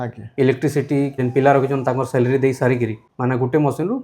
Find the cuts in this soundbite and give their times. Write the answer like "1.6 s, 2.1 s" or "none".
1.2 s, 3.1 s